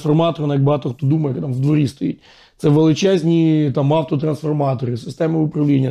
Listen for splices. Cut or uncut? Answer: uncut